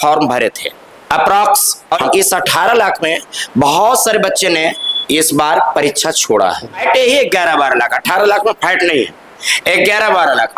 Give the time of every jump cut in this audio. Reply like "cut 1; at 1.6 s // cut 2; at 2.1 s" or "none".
cut 1; at 2.0 s // cut 2; at 6.8 s